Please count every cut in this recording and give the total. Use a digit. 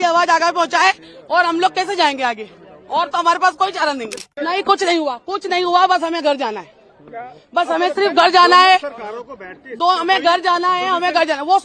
1